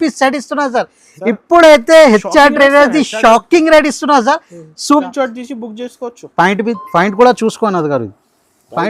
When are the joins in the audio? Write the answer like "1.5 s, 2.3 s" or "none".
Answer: 5.1 s